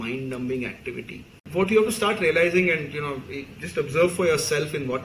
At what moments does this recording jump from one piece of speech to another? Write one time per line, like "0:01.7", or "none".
0:01.4